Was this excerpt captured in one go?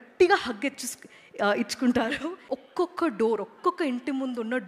no; 1 cut; at 2.4 s

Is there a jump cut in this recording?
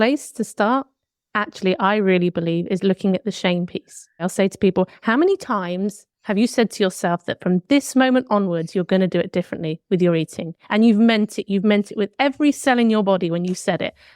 yes; 1 cut; at 4.2 s

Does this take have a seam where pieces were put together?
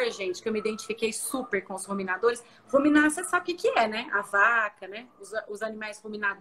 no; 0 cuts

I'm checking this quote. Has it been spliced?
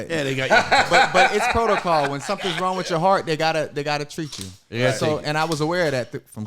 no; 0 cuts

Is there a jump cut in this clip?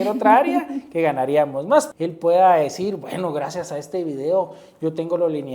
yes; 1 cut; at 1.9 s

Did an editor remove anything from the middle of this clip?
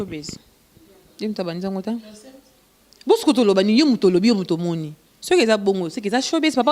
no; 0 cuts

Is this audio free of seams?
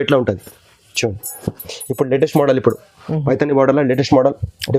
yes; 0 cuts

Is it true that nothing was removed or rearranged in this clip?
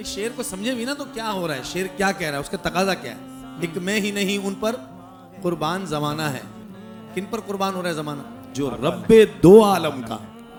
yes; 0 cuts

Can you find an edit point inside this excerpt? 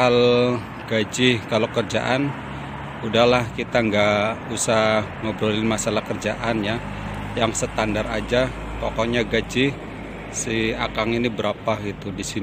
no; 0 cuts

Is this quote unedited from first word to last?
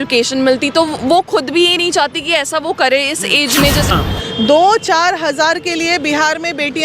no; 1 cut; at 3.9 s

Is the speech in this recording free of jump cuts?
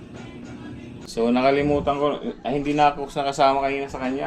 no; 1 cut; at 1.0 s

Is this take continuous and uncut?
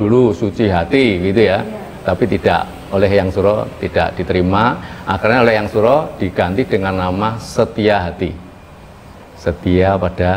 yes; 0 cuts

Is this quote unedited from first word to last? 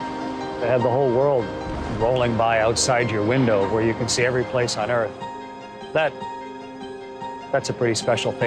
no; 1 cut; at 3.5 s

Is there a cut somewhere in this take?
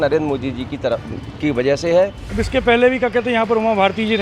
yes; 1 cut; at 2.2 s

